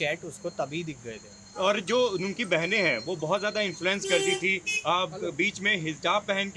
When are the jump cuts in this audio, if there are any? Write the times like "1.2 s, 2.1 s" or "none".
none